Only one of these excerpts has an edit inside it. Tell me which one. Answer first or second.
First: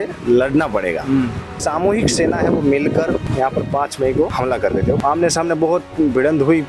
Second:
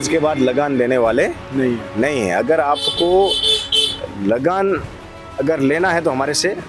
first